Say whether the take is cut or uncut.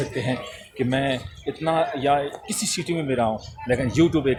uncut